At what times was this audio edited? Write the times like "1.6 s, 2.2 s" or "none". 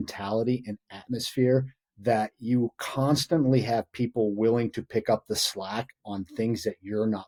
none